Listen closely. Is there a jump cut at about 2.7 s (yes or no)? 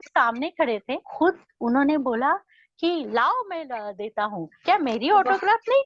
no